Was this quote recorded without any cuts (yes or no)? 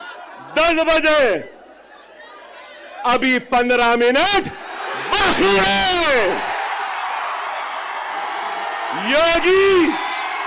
no